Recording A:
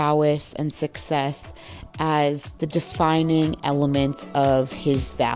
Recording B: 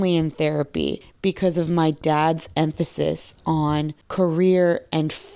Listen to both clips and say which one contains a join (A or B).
B